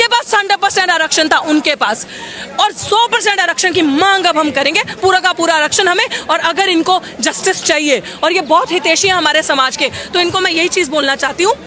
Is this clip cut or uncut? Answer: uncut